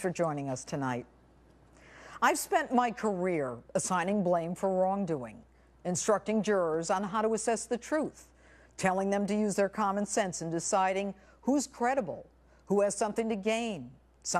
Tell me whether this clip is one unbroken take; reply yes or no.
no